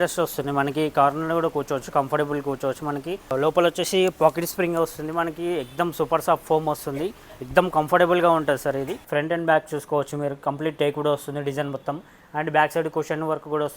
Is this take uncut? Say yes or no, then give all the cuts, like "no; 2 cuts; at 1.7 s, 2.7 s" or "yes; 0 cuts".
no; 2 cuts; at 3.3 s, 9.0 s